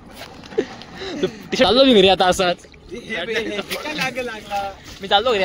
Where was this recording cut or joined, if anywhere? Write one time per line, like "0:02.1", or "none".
0:01.7